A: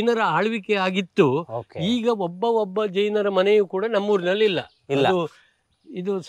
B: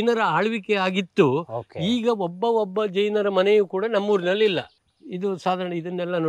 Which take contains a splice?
B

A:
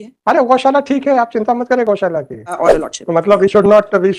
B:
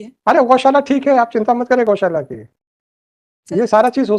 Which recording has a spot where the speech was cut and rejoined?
A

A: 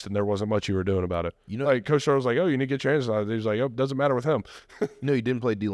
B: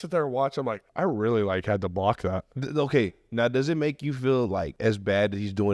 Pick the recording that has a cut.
B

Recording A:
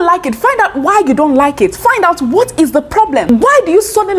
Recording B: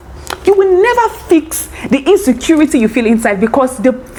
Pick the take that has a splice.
A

